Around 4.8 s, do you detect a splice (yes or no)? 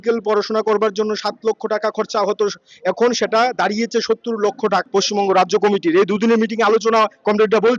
yes